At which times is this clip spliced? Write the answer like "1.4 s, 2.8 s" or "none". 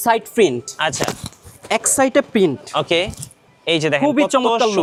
none